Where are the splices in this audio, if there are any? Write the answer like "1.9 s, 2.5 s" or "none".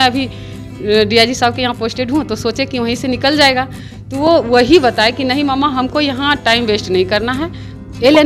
none